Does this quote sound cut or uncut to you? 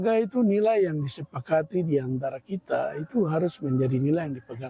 uncut